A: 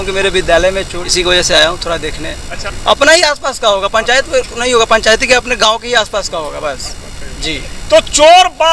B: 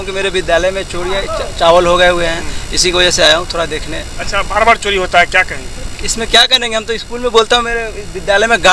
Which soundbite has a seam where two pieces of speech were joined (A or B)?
A